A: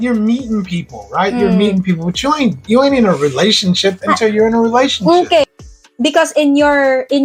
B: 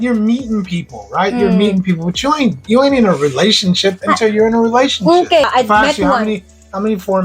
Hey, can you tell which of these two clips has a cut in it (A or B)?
B